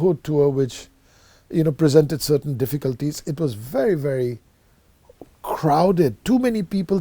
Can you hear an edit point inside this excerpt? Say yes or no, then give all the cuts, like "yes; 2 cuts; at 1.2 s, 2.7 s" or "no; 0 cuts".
yes; 1 cut; at 3.3 s